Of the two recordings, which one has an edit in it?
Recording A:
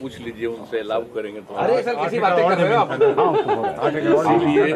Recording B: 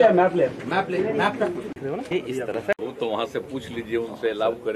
B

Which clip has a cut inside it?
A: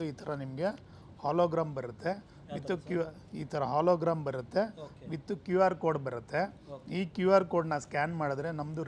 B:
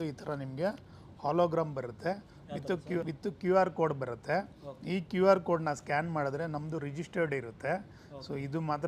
B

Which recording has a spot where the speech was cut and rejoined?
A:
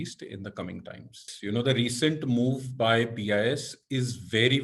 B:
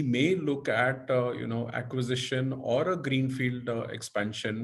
A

